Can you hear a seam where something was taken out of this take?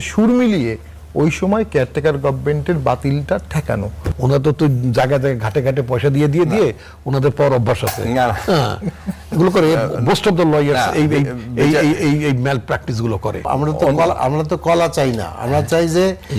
yes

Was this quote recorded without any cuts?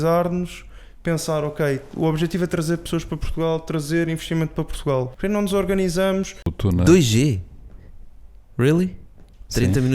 no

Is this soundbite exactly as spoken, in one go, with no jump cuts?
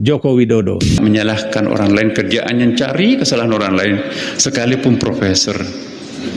no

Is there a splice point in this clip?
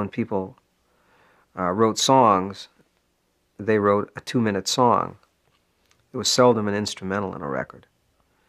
no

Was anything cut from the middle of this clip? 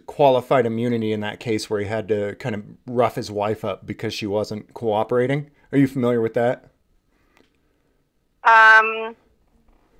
no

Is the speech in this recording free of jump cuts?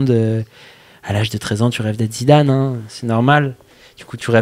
yes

